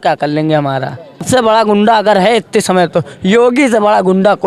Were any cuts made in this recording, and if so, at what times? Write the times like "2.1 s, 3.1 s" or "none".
1.2 s